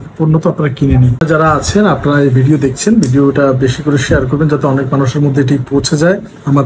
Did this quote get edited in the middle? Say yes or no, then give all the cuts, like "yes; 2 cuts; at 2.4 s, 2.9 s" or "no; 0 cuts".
yes; 1 cut; at 1.2 s